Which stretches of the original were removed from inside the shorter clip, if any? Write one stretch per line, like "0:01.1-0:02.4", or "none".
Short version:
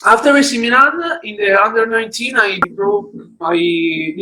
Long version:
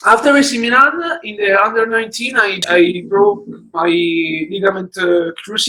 0:02.6-0:03.0